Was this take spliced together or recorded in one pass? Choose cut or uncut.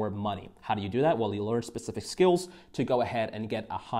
uncut